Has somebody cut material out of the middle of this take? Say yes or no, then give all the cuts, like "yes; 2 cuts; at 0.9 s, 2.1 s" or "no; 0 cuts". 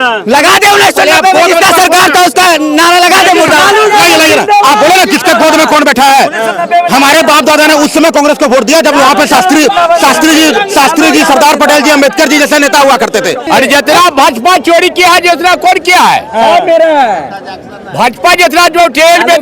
yes; 1 cut; at 13.5 s